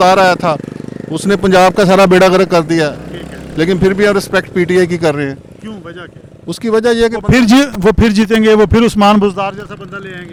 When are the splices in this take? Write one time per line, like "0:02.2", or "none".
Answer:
none